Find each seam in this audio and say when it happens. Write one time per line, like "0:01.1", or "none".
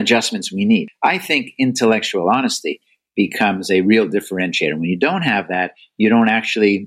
0:00.9